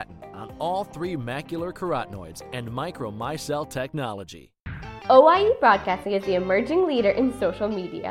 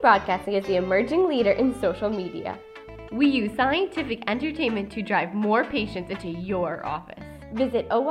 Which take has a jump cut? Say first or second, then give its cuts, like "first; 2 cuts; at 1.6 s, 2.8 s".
first; 1 cut; at 4.7 s